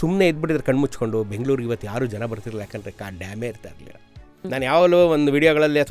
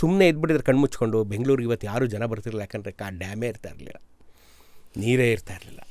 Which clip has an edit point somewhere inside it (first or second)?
first